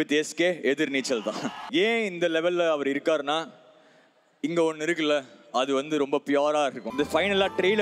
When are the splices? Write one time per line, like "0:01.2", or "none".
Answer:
0:01.5
0:06.8